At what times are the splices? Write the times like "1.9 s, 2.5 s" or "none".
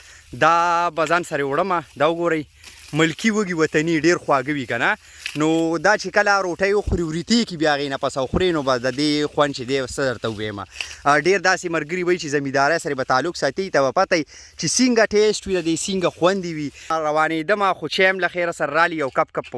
16.9 s

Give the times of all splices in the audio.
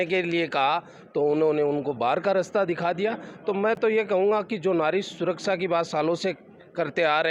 none

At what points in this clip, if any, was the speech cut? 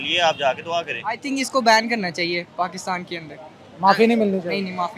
1.2 s

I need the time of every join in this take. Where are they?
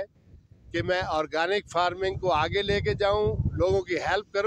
none

